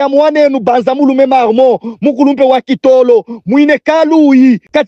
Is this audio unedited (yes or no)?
yes